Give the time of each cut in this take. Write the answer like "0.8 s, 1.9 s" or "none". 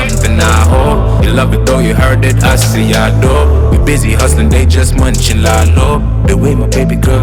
none

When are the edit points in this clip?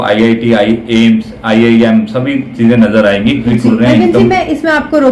3.5 s

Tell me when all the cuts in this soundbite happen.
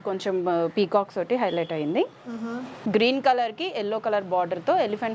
2.9 s

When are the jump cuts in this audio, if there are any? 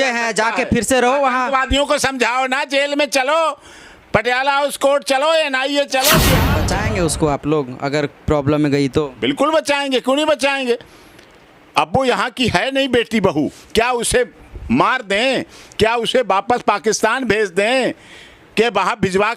6.5 s

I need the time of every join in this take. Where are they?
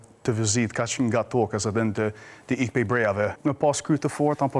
3.4 s

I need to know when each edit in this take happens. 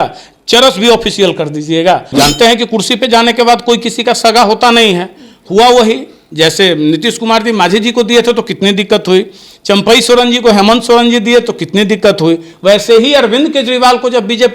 2.1 s

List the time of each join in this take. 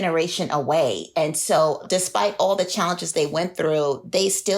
1.8 s

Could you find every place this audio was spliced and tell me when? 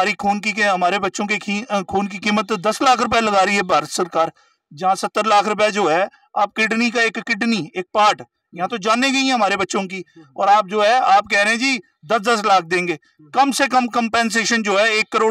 none

